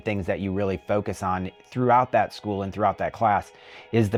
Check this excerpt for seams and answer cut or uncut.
uncut